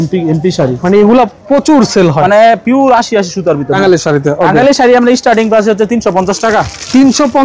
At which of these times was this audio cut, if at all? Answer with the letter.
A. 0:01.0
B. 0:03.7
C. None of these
B